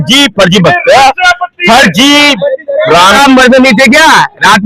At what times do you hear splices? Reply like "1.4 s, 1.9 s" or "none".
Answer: 3.2 s